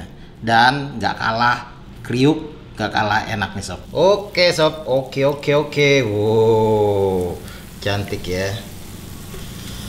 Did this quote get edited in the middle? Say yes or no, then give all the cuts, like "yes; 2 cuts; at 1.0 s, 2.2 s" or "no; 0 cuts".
yes; 1 cut; at 3.8 s